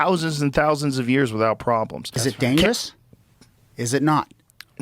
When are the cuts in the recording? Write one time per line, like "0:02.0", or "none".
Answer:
0:02.2

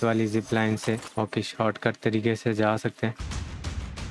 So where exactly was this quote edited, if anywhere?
0:01.1
0:03.2

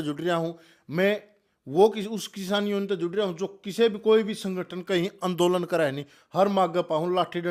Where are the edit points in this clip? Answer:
none

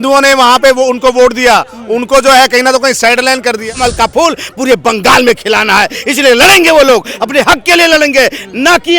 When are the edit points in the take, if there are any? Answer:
0:03.7

